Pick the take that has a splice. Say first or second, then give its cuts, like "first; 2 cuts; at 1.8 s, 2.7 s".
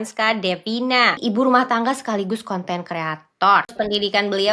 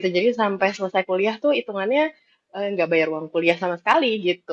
first; 2 cuts; at 1.2 s, 3.7 s